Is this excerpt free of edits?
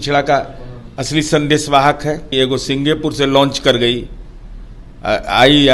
no; 1 cut; at 2.3 s

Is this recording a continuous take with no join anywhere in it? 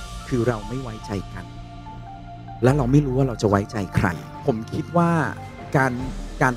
no; 1 cut; at 4.3 s

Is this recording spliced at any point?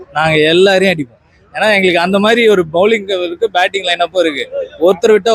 no; 0 cuts

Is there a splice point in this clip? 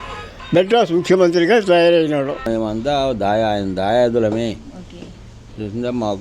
yes; 1 cut; at 2.5 s

